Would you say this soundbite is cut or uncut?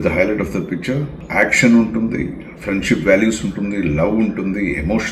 uncut